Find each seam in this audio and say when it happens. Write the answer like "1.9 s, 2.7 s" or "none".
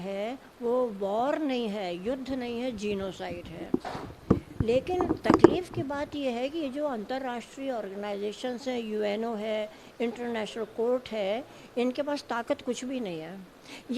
none